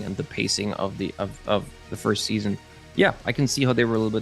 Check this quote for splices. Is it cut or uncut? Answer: uncut